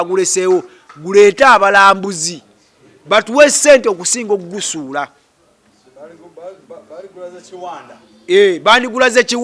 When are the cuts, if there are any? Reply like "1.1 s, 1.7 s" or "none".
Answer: none